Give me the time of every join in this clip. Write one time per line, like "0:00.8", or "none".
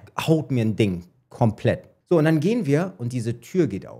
0:01.9